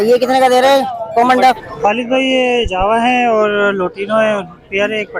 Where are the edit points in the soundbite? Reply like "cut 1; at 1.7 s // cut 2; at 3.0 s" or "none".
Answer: cut 1; at 1.7 s